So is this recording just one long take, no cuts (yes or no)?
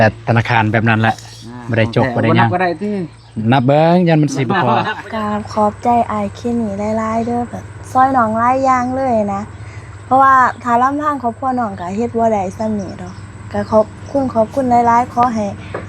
no